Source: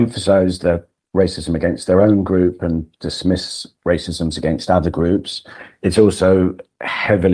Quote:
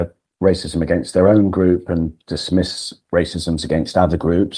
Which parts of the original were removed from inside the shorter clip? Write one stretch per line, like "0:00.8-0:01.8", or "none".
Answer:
none